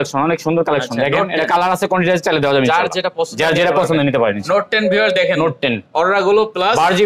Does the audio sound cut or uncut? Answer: uncut